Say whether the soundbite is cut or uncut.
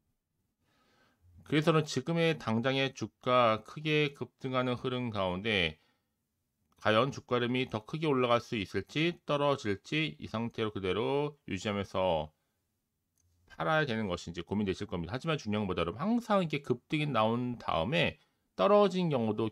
uncut